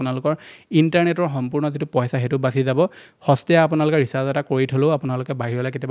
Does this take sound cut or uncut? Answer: uncut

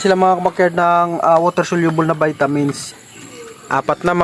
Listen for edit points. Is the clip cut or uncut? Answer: cut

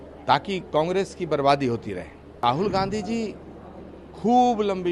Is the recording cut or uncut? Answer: cut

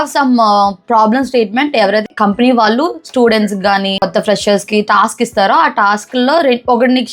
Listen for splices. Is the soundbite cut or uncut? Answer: cut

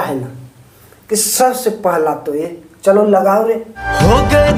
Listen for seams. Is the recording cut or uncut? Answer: uncut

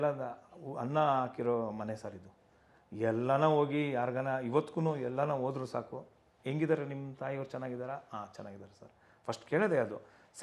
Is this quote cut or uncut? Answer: uncut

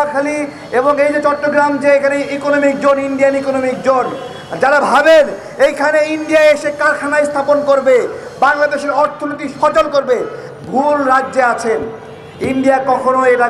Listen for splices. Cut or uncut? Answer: uncut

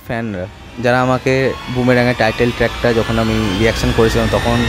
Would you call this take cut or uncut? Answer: cut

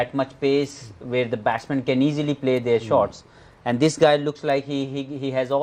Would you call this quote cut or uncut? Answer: uncut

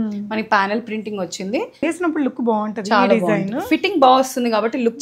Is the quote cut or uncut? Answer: cut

